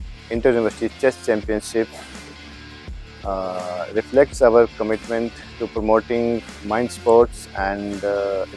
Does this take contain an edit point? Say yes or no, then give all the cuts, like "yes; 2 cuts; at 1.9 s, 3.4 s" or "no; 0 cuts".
no; 0 cuts